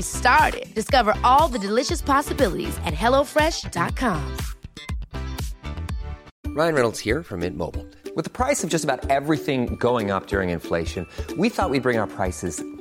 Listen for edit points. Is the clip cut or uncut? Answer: cut